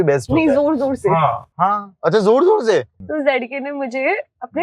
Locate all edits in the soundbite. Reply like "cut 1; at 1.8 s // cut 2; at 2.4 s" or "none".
cut 1; at 2.9 s